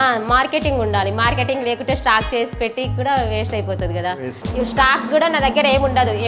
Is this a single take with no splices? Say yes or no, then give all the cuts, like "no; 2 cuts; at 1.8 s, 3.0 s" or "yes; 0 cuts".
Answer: yes; 0 cuts